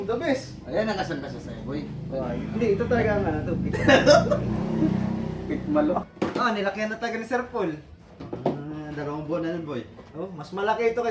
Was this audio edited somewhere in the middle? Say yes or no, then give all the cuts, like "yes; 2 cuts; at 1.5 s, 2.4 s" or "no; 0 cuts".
yes; 1 cut; at 6.1 s